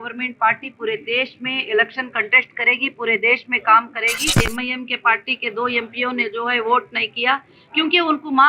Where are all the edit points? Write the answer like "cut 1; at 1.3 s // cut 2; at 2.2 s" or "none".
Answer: cut 1; at 4.4 s